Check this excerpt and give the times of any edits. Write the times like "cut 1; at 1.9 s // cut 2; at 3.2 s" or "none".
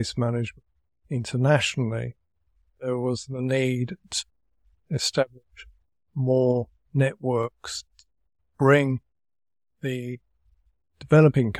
none